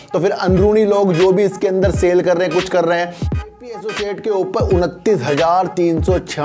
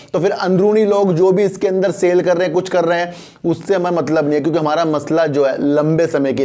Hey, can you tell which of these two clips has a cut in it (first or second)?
first